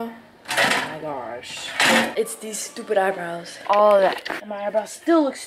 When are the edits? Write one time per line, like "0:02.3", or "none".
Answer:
0:02.1
0:03.5